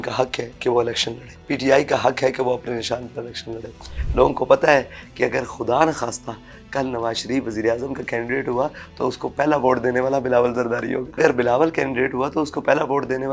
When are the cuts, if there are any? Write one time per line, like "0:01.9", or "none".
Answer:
0:01.3
0:03.9
0:11.2